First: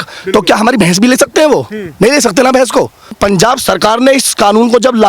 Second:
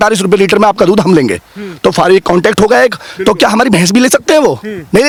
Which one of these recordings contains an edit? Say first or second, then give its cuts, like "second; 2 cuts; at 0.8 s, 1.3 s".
first; 1 cut; at 3.2 s